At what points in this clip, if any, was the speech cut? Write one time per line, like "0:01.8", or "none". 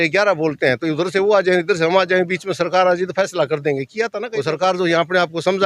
0:04.3